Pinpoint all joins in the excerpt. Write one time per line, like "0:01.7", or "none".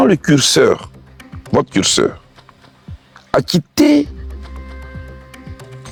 none